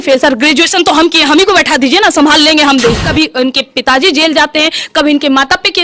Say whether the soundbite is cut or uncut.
cut